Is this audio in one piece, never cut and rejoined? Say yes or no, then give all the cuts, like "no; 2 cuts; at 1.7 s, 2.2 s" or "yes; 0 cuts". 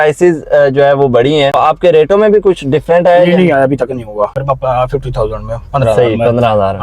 no; 2 cuts; at 1.6 s, 4.4 s